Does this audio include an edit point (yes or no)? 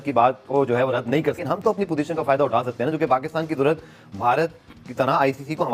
no